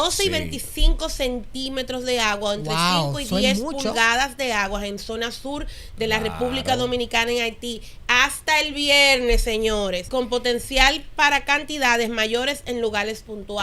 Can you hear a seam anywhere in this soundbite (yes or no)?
yes